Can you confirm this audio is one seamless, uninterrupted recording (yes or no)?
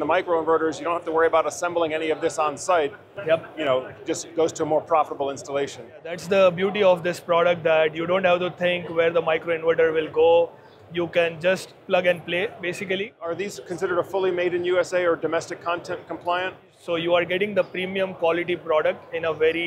no